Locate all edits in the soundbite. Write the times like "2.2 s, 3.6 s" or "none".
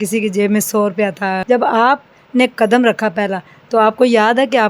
1.4 s